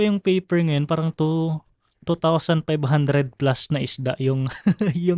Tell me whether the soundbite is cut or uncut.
uncut